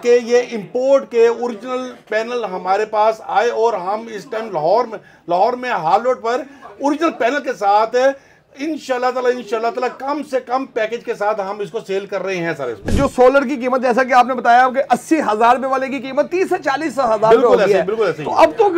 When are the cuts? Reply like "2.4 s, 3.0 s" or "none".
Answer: 12.9 s